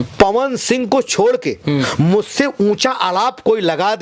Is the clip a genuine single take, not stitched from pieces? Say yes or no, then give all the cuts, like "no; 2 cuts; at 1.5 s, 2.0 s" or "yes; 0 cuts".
yes; 0 cuts